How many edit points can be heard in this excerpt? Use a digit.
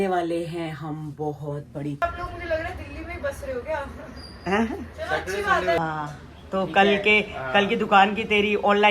2